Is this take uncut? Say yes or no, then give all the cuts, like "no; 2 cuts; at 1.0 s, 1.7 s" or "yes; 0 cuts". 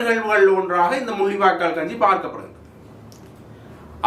yes; 0 cuts